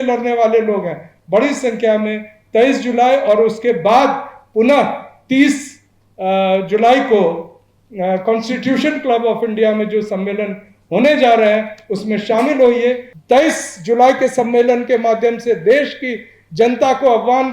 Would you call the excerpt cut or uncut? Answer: cut